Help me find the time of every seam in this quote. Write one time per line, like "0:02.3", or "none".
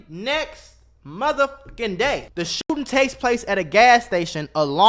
0:02.7